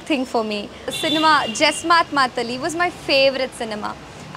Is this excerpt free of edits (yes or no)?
no